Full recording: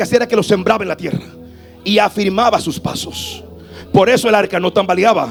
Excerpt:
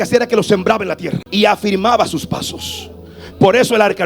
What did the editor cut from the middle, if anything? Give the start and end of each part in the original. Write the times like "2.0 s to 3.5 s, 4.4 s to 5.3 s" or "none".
1.2 s to 1.7 s